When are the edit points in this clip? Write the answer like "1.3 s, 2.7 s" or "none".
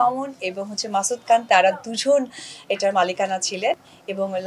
none